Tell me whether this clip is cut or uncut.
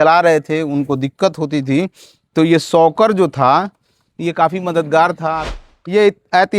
cut